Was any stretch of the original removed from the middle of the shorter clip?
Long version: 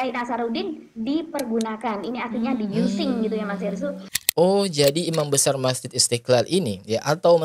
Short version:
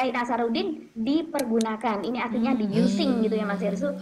no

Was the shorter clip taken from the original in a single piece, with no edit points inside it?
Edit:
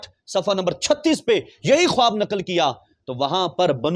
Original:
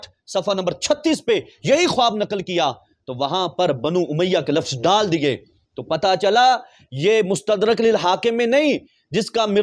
yes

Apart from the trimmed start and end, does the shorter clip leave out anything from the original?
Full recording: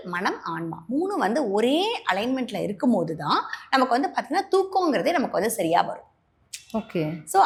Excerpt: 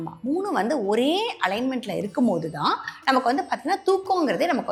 no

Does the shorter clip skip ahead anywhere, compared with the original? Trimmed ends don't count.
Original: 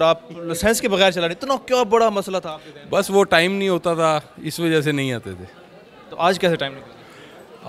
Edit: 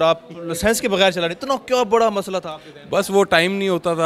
no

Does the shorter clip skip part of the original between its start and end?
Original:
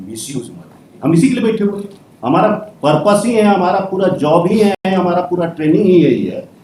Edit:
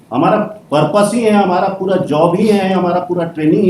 yes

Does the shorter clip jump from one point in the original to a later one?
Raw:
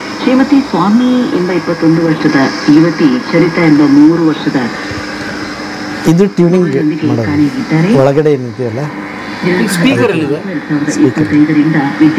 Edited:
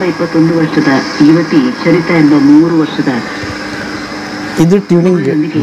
no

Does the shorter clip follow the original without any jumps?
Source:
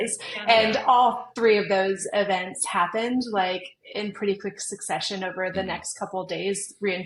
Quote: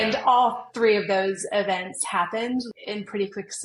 no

